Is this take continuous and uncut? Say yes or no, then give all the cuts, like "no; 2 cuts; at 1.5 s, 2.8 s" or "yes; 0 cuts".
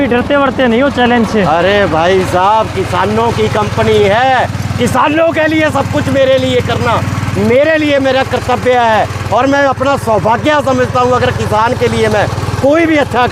yes; 0 cuts